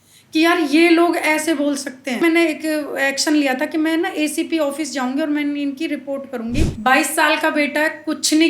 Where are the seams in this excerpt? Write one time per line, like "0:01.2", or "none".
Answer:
0:02.2
0:06.7